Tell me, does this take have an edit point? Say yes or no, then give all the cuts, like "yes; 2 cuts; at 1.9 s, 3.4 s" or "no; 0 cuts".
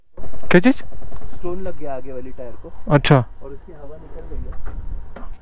no; 0 cuts